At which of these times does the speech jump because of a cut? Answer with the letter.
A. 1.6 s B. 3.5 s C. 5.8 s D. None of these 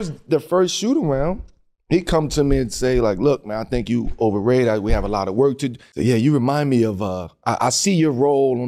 C